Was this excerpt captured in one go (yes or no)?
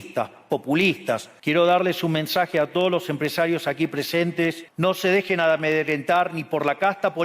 no